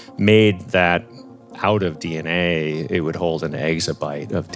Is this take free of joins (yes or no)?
yes